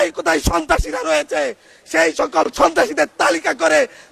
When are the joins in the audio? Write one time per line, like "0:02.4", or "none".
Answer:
none